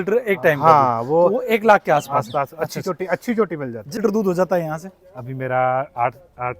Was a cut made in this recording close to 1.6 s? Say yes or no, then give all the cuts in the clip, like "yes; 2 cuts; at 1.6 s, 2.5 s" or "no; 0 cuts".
no; 1 cut; at 4.0 s